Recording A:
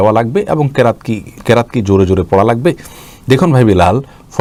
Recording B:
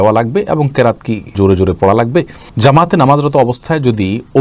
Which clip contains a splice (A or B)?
B